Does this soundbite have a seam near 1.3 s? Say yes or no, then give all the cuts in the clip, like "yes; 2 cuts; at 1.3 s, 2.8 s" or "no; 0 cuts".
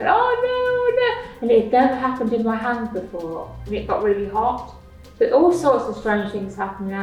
no; 0 cuts